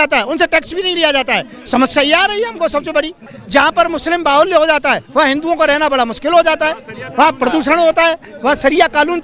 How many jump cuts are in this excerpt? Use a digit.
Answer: 1